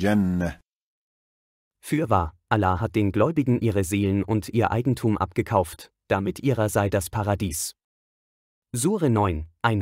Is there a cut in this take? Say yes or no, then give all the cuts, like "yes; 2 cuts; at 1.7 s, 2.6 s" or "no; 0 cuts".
no; 0 cuts